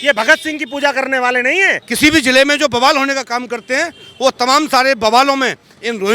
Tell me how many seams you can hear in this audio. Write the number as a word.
one